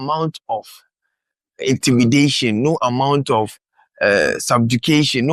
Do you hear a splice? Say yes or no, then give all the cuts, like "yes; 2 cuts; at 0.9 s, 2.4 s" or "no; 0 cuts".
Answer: no; 0 cuts